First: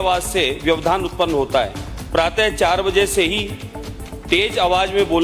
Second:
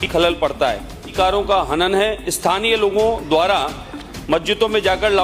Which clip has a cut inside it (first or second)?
second